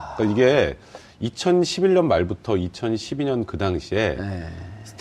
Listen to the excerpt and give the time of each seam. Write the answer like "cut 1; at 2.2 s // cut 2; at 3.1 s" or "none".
cut 1; at 3.8 s